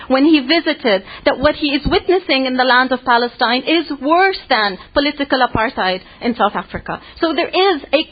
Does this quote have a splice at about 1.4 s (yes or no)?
yes